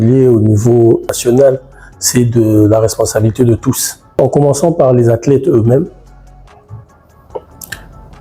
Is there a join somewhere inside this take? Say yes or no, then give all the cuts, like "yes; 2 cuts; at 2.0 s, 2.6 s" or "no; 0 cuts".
yes; 1 cut; at 1.1 s